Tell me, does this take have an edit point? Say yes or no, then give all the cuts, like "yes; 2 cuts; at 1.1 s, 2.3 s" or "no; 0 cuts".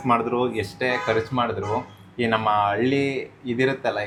no; 0 cuts